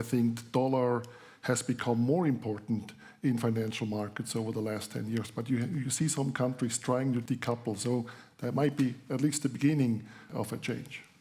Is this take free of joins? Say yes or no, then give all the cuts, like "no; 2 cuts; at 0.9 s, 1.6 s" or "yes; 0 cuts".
no; 2 cuts; at 7.2 s, 10.3 s